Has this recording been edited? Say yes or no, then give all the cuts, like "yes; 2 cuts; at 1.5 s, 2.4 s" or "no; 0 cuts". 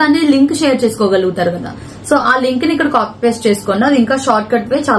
no; 0 cuts